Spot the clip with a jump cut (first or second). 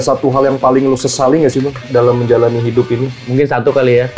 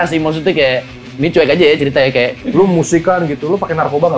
second